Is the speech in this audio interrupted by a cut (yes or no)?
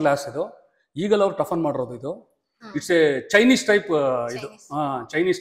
yes